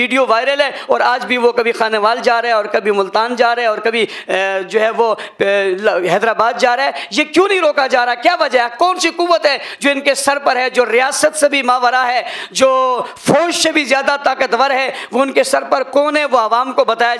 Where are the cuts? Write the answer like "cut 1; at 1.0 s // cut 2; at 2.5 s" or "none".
none